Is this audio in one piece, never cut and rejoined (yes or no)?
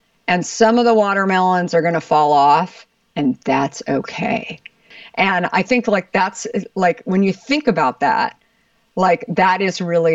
no